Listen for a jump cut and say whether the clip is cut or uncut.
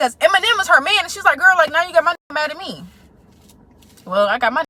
uncut